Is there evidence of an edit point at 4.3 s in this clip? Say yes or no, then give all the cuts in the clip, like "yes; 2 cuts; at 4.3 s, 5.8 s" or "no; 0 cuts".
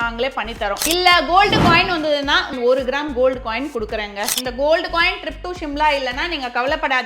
yes; 3 cuts; at 0.8 s, 2.5 s, 4.3 s